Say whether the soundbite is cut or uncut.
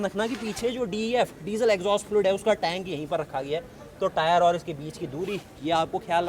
uncut